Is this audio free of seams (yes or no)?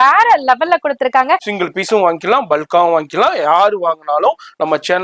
no